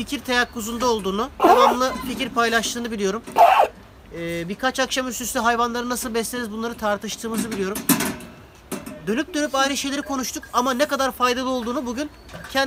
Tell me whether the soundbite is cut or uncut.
uncut